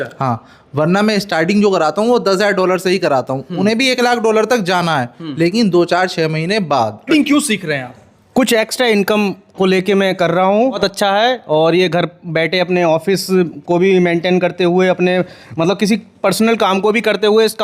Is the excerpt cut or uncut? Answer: cut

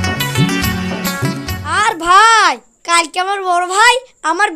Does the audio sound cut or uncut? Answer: cut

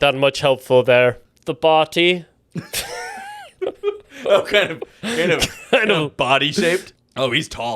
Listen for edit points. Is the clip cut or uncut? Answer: cut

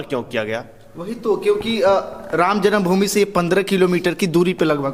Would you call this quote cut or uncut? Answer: uncut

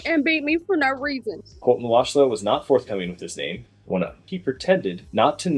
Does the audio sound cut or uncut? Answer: cut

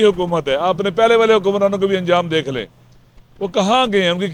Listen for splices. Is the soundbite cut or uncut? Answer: uncut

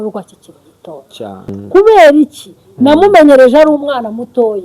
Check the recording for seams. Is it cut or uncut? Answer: cut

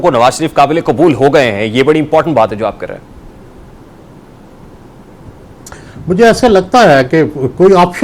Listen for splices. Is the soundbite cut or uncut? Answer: uncut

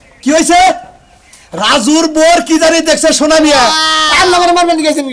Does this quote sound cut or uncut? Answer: cut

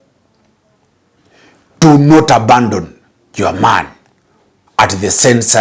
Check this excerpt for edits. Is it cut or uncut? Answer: uncut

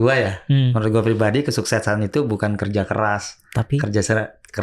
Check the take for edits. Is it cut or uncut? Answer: uncut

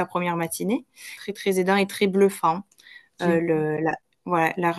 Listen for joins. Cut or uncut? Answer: cut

